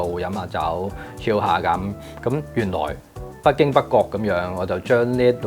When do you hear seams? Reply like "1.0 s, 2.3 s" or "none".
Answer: none